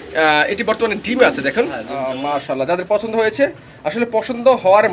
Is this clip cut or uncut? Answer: cut